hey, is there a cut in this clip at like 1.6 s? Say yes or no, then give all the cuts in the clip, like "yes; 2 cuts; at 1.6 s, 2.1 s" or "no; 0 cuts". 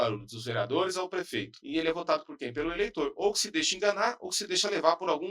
yes; 1 cut; at 1.6 s